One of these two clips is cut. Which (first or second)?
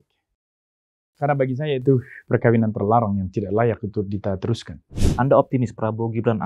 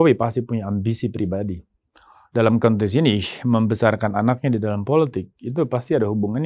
first